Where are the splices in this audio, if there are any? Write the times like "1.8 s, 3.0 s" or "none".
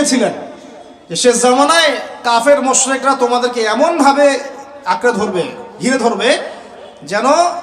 none